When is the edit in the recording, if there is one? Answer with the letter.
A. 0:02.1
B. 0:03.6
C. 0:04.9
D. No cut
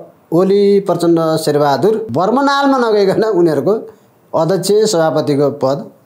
A